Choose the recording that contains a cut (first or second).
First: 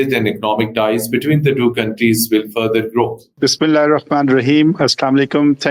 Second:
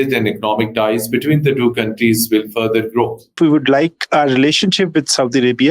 second